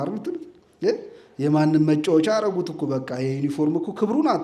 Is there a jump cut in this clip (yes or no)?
no